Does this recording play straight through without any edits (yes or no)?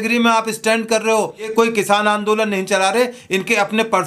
no